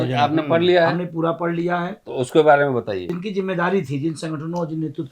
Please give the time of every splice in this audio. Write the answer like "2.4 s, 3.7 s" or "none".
3.1 s